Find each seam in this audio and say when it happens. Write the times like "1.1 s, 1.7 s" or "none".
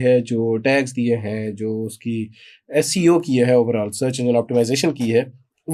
none